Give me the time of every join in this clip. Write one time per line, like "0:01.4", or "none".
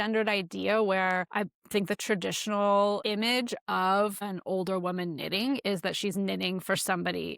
0:01.3
0:03.0
0:04.2